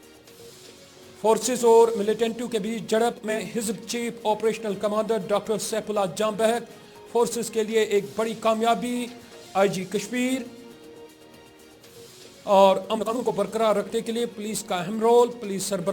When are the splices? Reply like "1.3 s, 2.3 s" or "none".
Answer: 3.4 s, 13.3 s